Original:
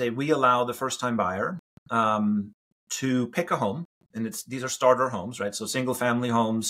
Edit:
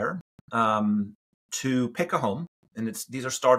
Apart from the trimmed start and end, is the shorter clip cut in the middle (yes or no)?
no